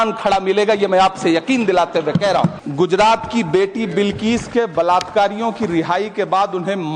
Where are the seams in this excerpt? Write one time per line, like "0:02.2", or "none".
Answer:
0:02.6